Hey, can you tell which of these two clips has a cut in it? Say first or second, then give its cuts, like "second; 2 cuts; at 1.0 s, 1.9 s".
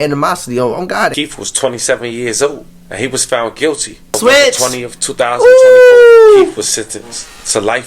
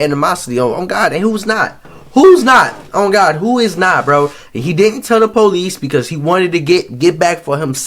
first; 2 cuts; at 1.1 s, 4.1 s